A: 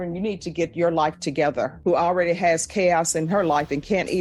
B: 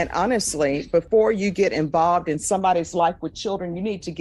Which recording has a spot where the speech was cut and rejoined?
A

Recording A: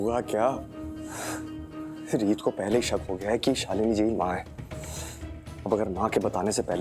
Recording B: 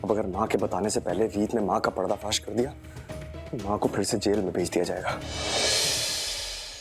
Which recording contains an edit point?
B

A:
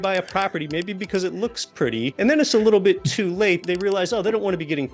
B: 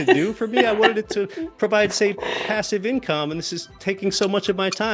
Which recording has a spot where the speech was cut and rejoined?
A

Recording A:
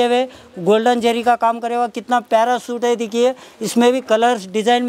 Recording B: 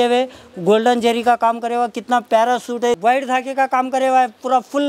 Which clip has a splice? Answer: B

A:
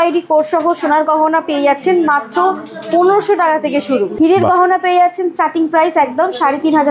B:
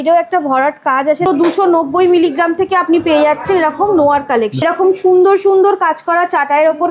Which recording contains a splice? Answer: B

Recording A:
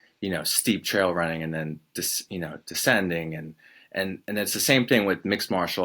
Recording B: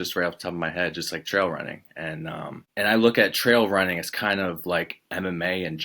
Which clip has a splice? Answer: B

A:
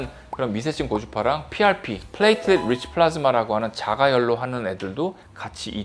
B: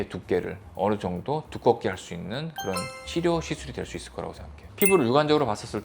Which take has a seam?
B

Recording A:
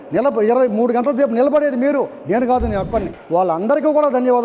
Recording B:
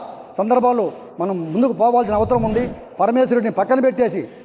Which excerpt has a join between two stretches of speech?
A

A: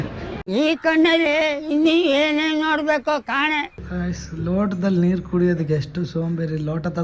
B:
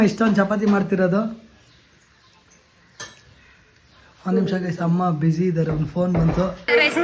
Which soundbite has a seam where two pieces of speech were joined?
A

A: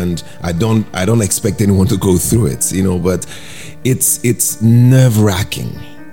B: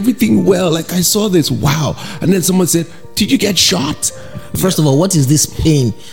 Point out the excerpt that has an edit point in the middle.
B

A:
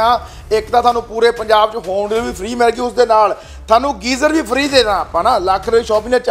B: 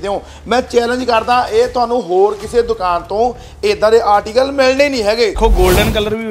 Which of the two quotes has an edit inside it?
B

